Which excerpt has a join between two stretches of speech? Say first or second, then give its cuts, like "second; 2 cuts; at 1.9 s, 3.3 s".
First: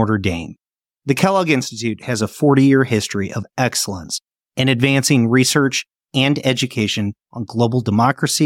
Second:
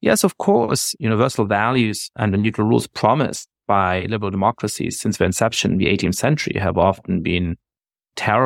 second; 2 cuts; at 0.9 s, 2.1 s